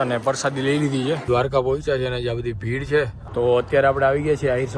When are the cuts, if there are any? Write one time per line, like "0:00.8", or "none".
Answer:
0:01.2
0:03.2